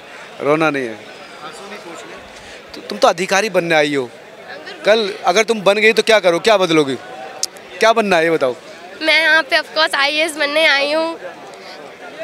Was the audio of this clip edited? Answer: no; 0 cuts

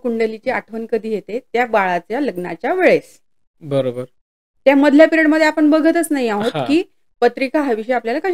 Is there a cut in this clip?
no; 0 cuts

